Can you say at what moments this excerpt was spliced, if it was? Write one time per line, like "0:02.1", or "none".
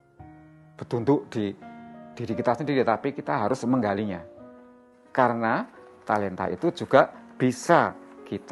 none